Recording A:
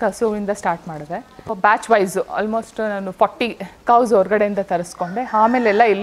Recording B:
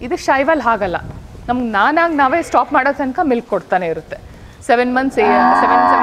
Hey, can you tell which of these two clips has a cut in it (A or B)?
A